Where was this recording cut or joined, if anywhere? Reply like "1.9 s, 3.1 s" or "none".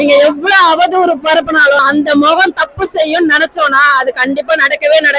1.8 s